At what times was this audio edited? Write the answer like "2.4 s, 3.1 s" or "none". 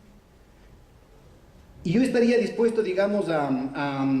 0.9 s